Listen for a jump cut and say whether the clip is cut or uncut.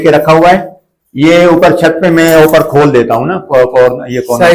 uncut